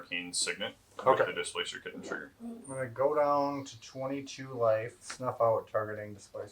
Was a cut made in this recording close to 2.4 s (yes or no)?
no